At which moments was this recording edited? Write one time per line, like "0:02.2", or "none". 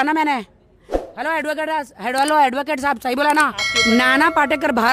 0:03.7